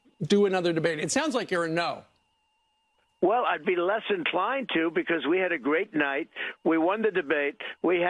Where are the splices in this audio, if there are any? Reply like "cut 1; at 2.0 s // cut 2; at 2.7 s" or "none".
none